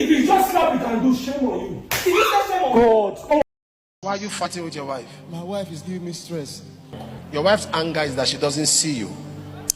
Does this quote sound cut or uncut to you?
cut